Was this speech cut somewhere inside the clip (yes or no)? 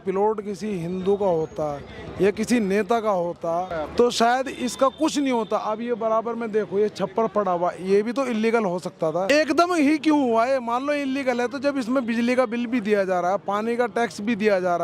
yes